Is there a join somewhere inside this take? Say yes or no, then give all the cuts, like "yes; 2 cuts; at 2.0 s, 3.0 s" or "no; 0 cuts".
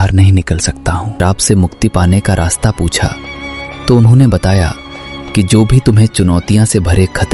yes; 1 cut; at 1.1 s